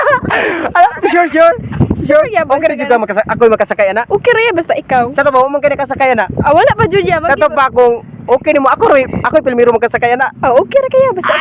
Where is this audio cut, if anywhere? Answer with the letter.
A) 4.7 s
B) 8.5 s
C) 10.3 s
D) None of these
C